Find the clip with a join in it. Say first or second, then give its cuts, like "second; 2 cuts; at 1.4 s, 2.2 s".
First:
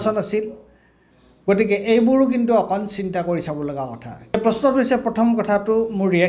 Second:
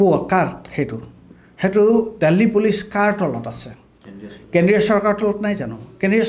first; 1 cut; at 4.3 s